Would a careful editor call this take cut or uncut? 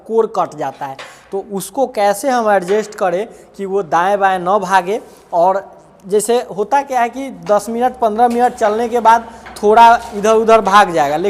uncut